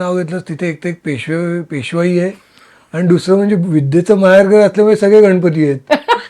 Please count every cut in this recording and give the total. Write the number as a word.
zero